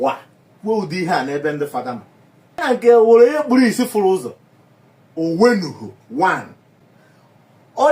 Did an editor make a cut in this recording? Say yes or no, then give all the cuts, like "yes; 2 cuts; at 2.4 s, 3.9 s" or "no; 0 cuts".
yes; 1 cut; at 2.6 s